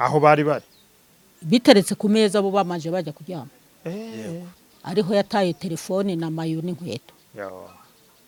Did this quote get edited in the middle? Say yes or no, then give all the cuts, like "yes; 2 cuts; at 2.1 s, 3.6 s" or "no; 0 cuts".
no; 0 cuts